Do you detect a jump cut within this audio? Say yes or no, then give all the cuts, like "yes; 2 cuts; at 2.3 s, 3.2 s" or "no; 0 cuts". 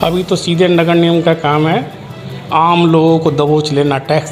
no; 0 cuts